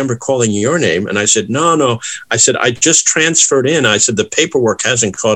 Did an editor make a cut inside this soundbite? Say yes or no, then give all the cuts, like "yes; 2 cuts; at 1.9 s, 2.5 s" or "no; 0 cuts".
no; 0 cuts